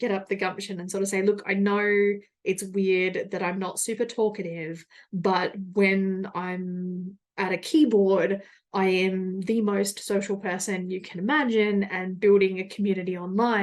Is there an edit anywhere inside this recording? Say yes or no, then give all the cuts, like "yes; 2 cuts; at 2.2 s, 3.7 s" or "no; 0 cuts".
no; 0 cuts